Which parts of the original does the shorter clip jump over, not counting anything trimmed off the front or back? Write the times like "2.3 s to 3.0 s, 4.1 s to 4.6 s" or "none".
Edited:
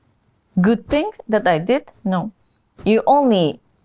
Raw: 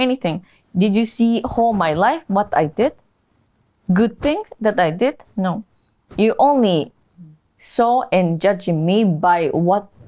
none